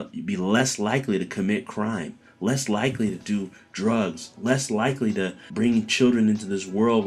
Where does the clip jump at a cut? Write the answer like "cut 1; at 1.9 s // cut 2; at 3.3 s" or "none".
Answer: cut 1; at 5.4 s